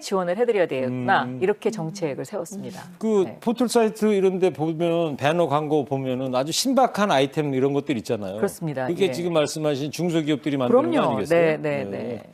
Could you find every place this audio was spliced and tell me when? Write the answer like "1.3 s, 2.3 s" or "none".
none